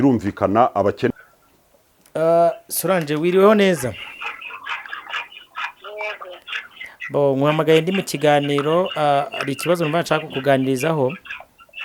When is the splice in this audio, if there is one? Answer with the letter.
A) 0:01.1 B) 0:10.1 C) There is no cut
A